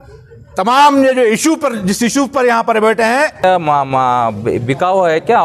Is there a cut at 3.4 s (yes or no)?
yes